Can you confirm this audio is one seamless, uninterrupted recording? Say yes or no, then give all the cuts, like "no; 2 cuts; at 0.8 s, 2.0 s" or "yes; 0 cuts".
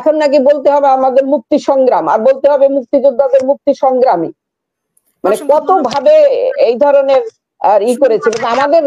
yes; 0 cuts